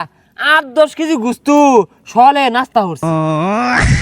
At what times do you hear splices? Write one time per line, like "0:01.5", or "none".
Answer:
0:03.1